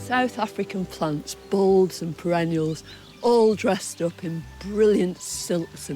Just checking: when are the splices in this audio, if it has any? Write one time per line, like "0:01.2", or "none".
none